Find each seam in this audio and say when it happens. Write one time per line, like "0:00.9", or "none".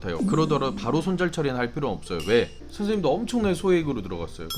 0:02.6